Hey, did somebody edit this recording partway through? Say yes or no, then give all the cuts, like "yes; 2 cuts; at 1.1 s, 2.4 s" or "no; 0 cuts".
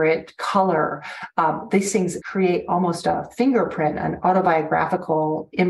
yes; 1 cut; at 2.2 s